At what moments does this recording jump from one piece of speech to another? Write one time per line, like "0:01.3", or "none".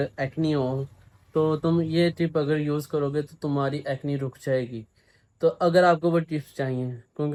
none